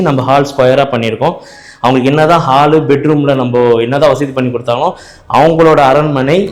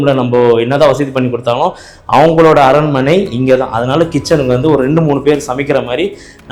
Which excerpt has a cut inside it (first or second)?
first